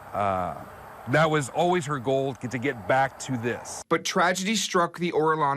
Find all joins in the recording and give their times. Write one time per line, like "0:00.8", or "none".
none